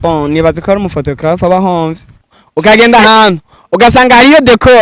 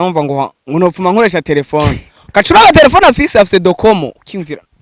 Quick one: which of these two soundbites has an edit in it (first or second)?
first